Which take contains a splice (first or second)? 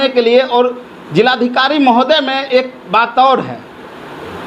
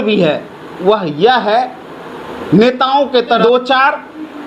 second